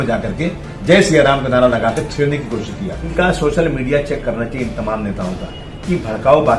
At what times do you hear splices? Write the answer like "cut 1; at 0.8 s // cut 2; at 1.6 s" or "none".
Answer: cut 1; at 3.0 s